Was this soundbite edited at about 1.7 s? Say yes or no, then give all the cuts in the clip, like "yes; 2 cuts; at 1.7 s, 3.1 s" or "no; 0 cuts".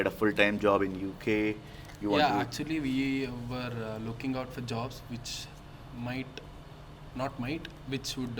no; 0 cuts